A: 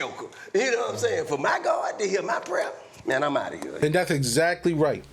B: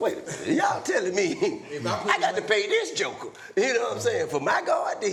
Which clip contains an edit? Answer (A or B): A